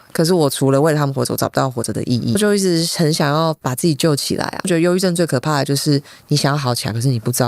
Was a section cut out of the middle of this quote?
yes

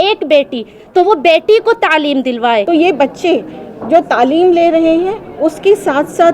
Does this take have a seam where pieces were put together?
yes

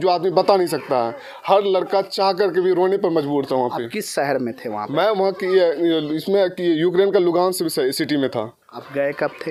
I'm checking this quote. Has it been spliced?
no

